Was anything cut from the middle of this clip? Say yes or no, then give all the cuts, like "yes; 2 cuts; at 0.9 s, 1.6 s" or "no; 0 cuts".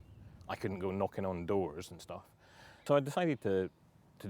yes; 1 cut; at 2.8 s